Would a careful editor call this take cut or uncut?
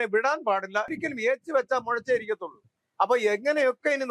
cut